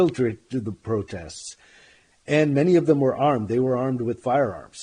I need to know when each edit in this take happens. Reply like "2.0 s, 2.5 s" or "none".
none